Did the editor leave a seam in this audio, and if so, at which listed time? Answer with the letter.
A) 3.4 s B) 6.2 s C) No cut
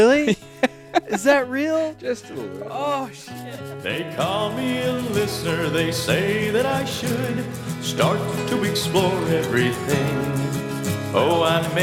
A